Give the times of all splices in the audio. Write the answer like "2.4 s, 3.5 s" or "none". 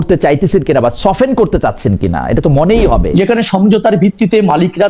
3.1 s

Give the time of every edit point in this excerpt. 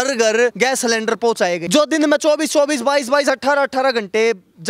1.6 s

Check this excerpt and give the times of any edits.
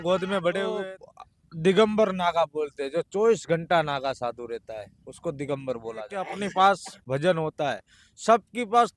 0.9 s, 6.2 s

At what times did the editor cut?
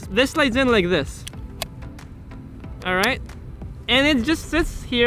none

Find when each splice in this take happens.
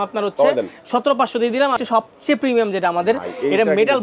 1.7 s

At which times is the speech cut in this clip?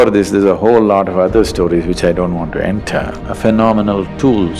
3.2 s

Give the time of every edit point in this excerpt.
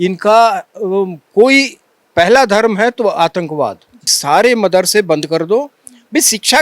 4.1 s

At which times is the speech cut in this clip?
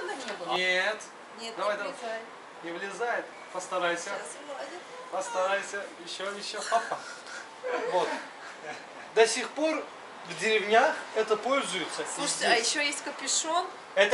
none

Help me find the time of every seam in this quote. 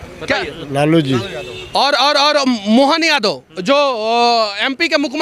none

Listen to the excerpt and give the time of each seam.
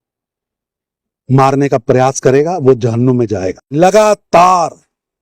3.5 s

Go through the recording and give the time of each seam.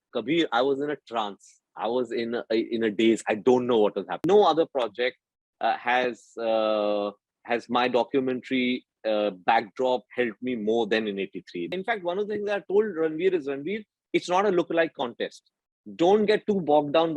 4.2 s, 11.7 s

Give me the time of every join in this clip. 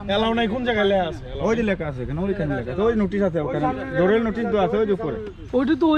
none

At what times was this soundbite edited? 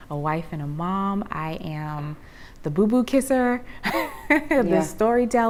none

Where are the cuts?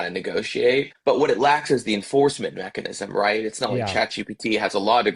0.9 s

